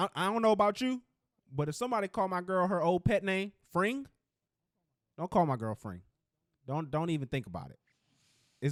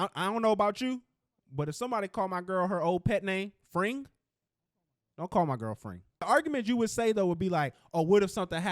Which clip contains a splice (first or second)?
second